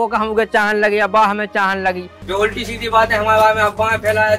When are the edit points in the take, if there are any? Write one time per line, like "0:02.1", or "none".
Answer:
0:02.1